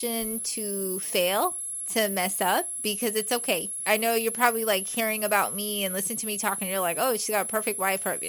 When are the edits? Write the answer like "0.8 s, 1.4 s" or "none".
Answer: 3.8 s